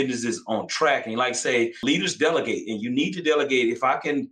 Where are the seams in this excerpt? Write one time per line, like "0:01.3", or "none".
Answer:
0:01.8